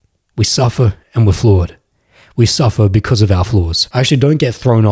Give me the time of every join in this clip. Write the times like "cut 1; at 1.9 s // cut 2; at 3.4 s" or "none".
cut 1; at 3.8 s